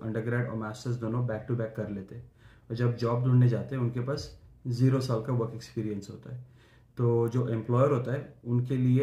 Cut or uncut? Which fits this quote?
uncut